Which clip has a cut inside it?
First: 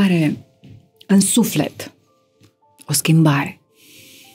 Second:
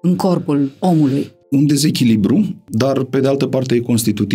second; 2 cuts; at 1.4 s, 2.6 s

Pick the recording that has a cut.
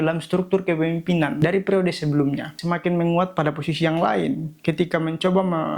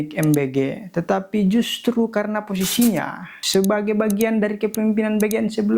first; 2 cuts; at 1.3 s, 2.5 s

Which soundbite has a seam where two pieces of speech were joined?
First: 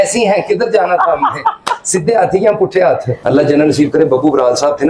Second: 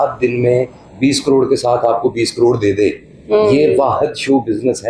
first; 1 cut; at 3.1 s

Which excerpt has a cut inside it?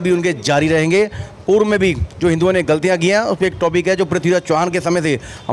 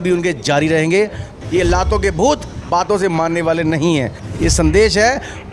second; 2 cuts; at 1.3 s, 4.2 s

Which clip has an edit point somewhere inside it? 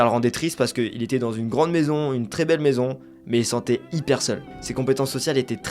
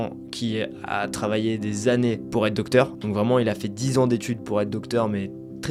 first; 1 cut; at 4.5 s

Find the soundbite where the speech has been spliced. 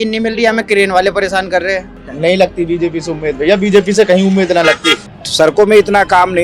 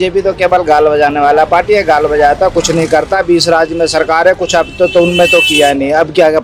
first; 2 cuts; at 2.1 s, 4.9 s

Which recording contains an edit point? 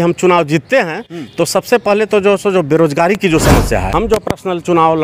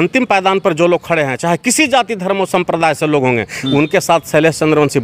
first; 1 cut; at 3.9 s

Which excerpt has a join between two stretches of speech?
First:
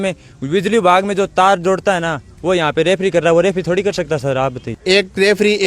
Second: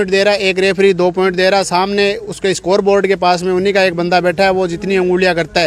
first; 1 cut; at 4.7 s

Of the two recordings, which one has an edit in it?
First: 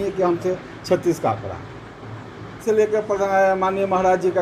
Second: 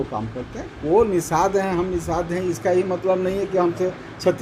first; 1 cut; at 2.5 s

